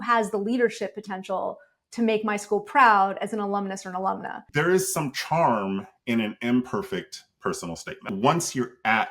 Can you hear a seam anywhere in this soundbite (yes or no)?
yes